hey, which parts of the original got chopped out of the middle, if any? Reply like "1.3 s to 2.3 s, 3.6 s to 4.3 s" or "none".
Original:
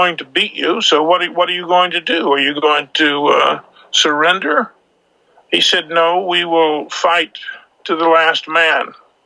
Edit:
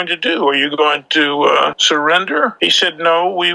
3.6 s to 3.9 s, 4.7 s to 5.5 s